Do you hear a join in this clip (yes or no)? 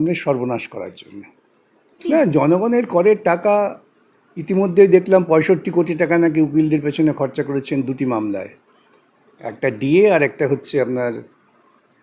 yes